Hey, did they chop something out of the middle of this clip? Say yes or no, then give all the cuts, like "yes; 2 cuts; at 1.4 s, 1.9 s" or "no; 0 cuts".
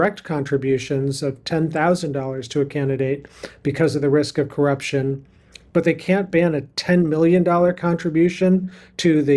no; 0 cuts